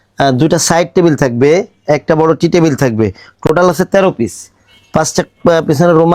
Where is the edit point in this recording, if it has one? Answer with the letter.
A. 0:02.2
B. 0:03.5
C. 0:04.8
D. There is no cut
D